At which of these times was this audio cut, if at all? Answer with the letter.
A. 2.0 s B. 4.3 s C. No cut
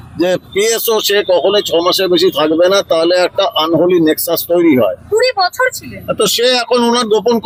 C